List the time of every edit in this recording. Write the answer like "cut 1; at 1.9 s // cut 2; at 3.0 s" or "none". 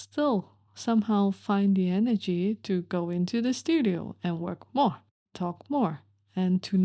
cut 1; at 5.3 s